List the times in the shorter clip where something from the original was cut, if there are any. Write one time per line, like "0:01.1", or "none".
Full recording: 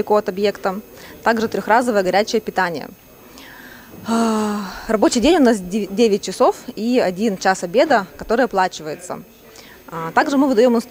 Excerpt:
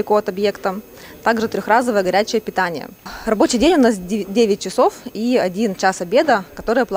0:03.1